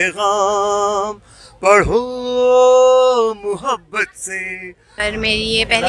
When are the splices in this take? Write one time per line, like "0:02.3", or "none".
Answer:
0:04.8